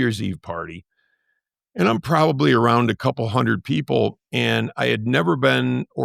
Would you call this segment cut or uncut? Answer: uncut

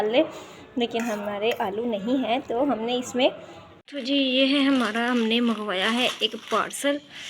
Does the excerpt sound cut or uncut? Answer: cut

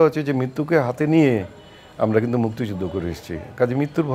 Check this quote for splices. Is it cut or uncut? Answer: uncut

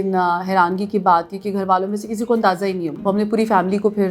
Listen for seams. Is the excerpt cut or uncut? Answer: cut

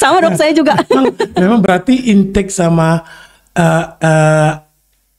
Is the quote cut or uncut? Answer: uncut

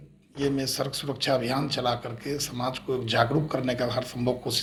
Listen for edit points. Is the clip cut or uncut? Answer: uncut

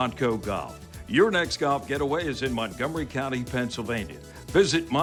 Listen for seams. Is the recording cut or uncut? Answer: uncut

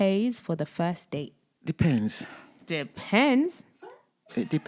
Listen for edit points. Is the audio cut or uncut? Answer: cut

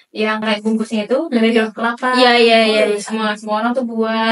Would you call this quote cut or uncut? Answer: uncut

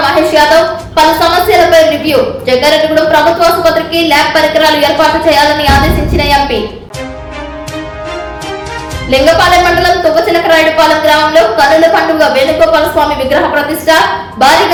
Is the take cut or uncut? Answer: uncut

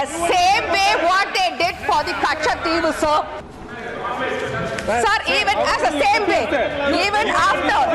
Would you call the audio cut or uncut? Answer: cut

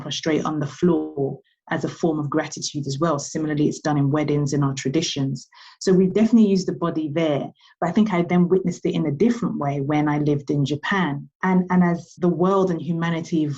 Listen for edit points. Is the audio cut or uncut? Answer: cut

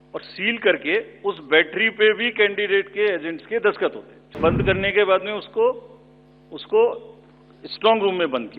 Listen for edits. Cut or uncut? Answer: cut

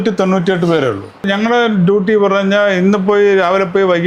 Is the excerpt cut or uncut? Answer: cut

